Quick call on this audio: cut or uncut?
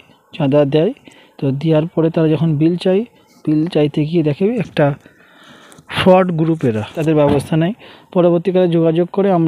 cut